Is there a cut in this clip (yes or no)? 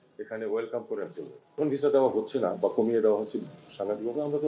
yes